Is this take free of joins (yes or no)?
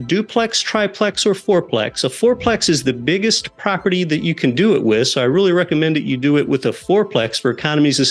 yes